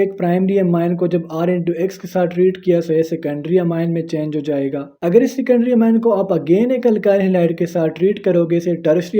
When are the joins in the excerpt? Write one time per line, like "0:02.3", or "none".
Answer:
0:04.9